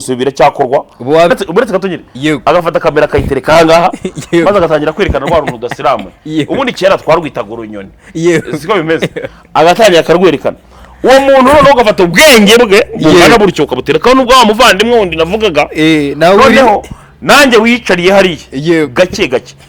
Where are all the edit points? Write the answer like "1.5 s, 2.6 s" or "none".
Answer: 1.3 s